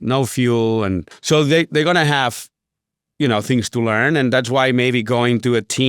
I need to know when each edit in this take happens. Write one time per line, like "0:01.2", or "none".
0:01.1